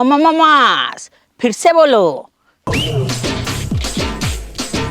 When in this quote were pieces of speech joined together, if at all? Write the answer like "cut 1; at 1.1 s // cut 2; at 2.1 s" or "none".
none